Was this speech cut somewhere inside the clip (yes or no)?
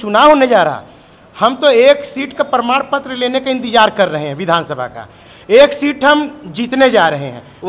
no